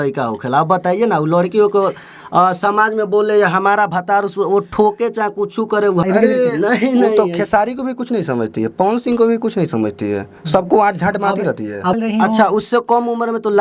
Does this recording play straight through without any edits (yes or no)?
no